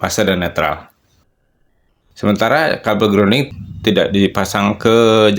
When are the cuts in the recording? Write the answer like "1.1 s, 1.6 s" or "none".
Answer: 1.4 s, 3.5 s

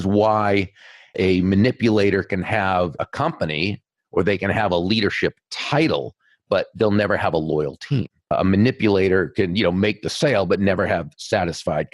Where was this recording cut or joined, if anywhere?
8.3 s

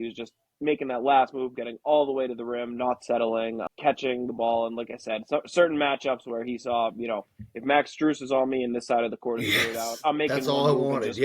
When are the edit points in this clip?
3.6 s

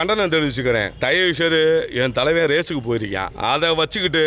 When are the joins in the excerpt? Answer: 0.9 s, 3.3 s

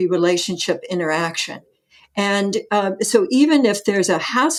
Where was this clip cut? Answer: none

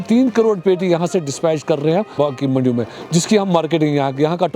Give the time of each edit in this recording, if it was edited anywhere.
none

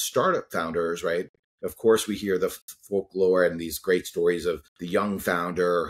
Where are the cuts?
2.7 s, 4.7 s

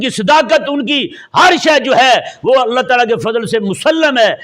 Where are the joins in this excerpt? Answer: none

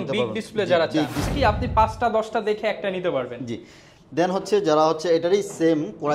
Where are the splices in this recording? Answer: 1.3 s

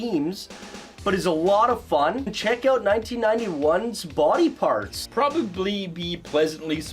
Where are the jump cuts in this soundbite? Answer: 2.3 s, 5.0 s

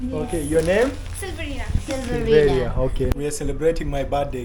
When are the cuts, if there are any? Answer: 3.1 s

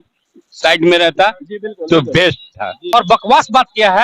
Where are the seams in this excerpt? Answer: 2.8 s

